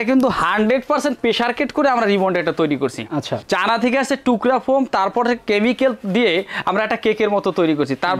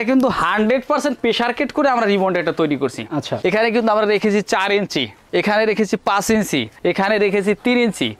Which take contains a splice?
second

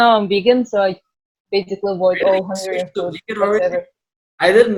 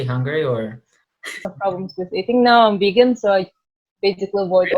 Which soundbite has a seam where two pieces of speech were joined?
second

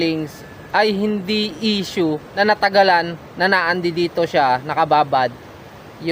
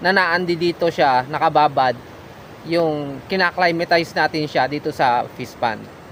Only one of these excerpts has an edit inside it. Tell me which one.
first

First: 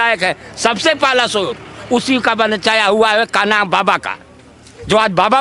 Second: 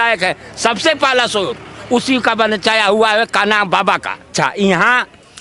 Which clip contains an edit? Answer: second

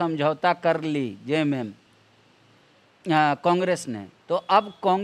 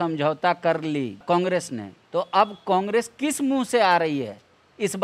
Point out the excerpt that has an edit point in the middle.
second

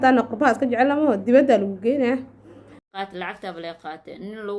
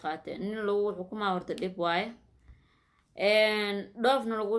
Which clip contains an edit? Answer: first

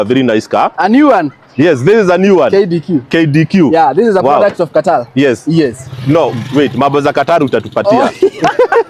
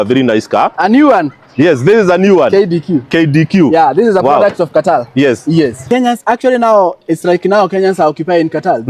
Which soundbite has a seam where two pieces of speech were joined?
second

